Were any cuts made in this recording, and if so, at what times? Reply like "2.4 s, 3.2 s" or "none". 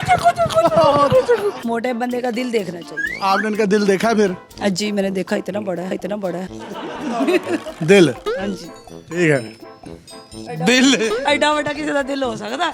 1.6 s